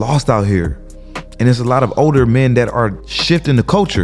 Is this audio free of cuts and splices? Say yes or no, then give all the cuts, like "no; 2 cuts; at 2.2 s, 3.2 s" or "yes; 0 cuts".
no; 1 cut; at 3.1 s